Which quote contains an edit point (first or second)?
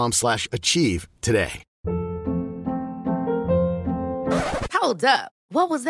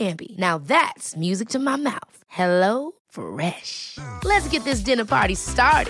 first